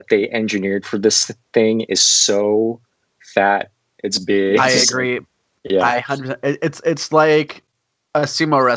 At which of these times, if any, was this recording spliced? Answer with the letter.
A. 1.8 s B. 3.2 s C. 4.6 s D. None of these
C